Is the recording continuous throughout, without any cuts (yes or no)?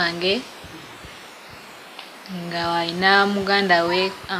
yes